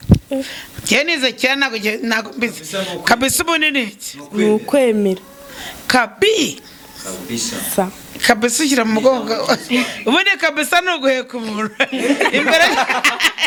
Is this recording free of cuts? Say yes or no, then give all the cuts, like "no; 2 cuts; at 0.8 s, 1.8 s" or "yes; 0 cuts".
yes; 0 cuts